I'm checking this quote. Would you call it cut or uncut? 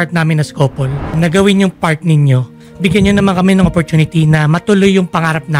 cut